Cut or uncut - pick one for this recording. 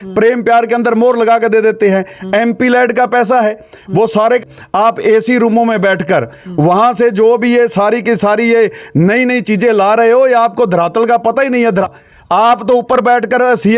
cut